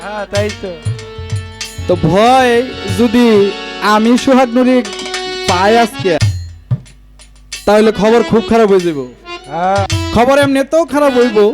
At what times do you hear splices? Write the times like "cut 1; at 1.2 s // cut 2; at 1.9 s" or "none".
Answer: cut 1; at 6.2 s // cut 2; at 10.0 s